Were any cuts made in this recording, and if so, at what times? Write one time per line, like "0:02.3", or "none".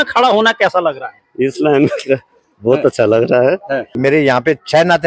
0:03.9